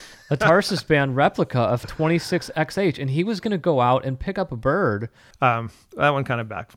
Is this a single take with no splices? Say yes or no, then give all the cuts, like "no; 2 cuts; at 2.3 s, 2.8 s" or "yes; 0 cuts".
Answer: no; 1 cut; at 5.2 s